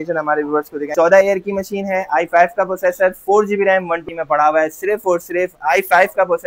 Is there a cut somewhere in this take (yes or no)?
yes